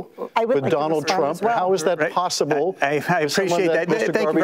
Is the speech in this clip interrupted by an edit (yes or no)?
no